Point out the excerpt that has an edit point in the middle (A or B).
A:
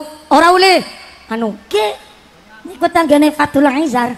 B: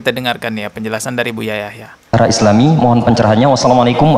A